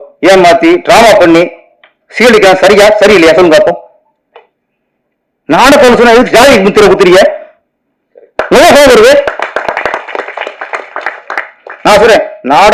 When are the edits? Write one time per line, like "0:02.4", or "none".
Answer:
none